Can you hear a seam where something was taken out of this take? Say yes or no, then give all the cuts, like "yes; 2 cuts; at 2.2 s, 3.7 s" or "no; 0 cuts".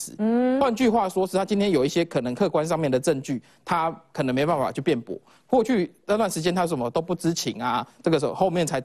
no; 0 cuts